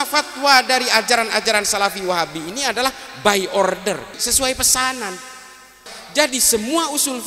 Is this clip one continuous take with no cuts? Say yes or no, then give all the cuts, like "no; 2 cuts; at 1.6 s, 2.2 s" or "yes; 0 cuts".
no; 2 cuts; at 4.2 s, 5.9 s